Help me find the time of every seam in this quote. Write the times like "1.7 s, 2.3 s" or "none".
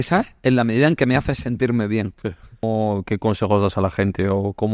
2.6 s